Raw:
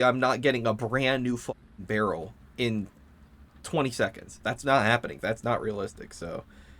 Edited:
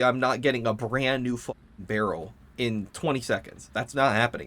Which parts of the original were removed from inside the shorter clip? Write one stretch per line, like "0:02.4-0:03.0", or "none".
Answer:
0:02.9-0:03.6